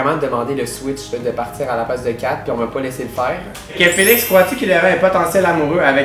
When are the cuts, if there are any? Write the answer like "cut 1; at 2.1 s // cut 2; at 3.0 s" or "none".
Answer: cut 1; at 3.8 s